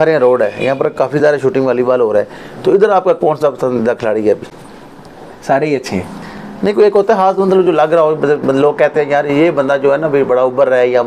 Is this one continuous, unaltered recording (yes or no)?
yes